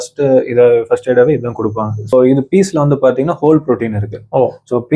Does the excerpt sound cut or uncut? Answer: cut